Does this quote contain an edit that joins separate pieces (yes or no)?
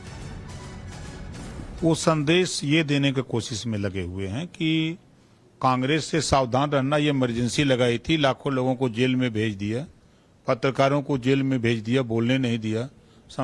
no